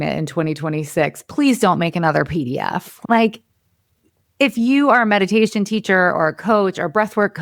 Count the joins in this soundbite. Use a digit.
1